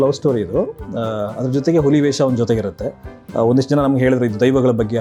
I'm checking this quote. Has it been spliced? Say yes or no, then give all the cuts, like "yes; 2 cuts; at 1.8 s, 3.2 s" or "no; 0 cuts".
no; 0 cuts